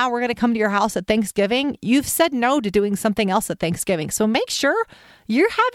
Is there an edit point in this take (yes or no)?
no